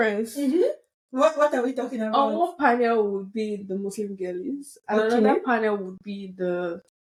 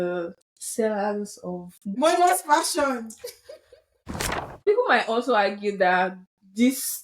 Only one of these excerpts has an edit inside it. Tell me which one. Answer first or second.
second